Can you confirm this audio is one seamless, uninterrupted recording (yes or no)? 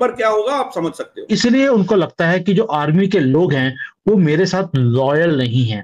no